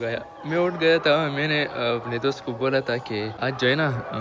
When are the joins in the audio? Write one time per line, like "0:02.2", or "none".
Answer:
0:03.3